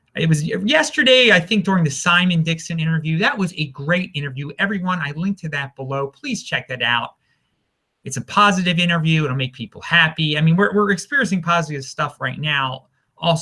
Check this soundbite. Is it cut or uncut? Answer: cut